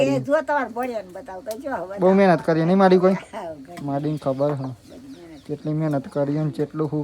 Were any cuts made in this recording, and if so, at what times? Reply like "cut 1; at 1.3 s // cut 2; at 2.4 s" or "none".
none